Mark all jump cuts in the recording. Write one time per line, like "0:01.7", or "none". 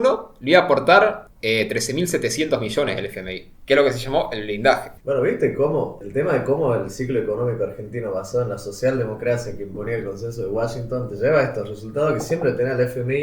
0:04.9
0:06.0